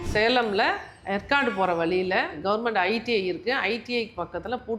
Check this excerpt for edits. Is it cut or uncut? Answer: cut